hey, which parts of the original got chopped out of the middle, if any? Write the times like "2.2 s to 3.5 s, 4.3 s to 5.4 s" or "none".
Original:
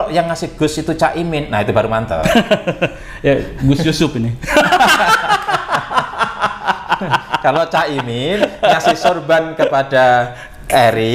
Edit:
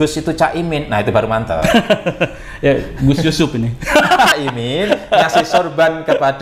4.9 s to 7.8 s